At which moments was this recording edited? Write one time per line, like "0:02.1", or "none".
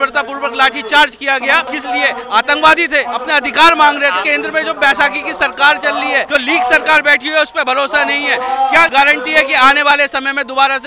0:01.7
0:03.1
0:04.2
0:06.3
0:08.9